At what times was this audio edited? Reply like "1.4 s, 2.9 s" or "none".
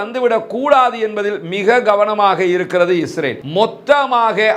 3.4 s